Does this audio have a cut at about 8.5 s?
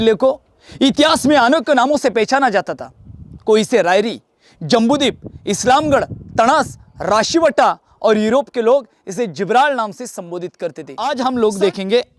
no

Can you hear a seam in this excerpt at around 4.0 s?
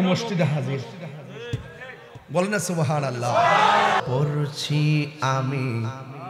yes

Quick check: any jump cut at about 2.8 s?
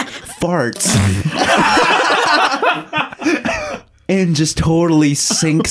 no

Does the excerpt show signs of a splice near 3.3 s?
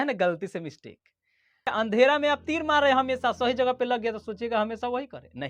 no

